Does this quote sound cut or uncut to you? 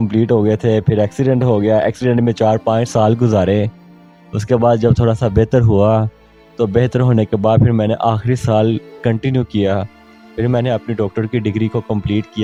uncut